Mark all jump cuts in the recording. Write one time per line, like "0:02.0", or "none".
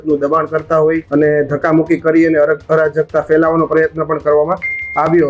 0:01.0